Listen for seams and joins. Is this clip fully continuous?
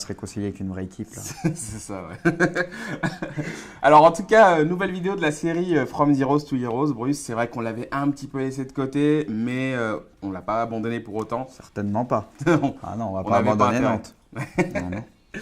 no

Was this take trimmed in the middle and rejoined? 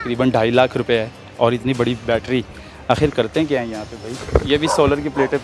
yes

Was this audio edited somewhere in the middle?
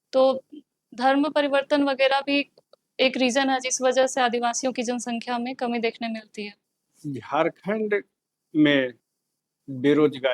yes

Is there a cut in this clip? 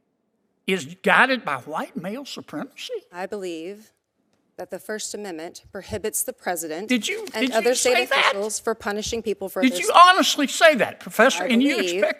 no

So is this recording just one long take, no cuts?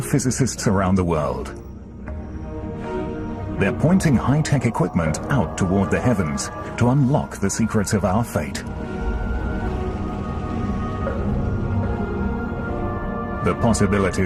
yes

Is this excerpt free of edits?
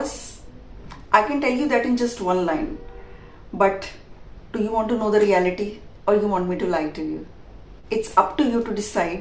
yes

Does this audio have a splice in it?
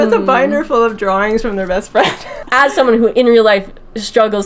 yes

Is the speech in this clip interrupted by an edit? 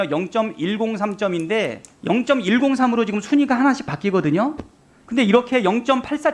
yes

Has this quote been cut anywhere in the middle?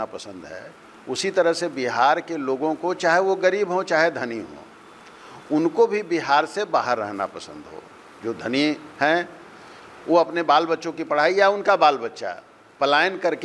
no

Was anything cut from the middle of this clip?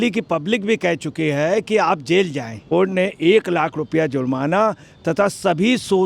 yes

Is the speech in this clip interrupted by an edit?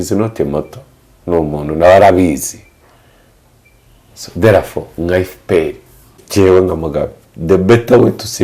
yes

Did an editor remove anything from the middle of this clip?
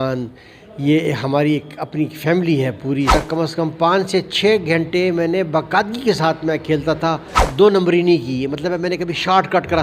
yes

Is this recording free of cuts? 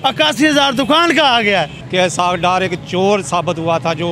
no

